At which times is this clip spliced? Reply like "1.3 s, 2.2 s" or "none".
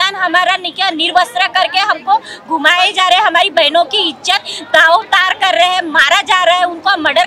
none